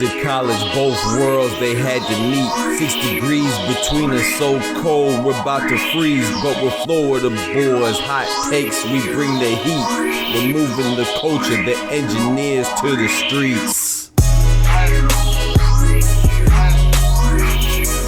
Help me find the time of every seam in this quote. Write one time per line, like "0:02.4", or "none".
none